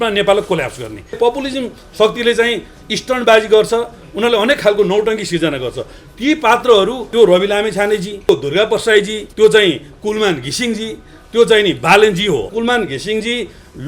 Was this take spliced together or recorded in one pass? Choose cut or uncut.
cut